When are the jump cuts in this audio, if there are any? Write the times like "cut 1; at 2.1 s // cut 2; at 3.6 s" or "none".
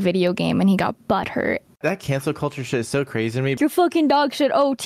cut 1; at 1.8 s // cut 2; at 3.6 s